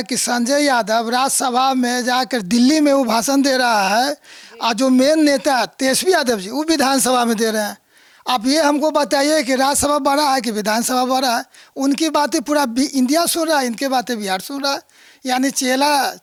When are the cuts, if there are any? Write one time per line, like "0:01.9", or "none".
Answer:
none